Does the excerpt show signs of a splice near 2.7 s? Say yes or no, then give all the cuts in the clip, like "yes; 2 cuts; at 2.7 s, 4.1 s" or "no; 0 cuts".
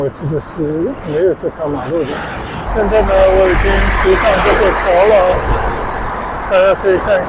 yes; 1 cut; at 2.7 s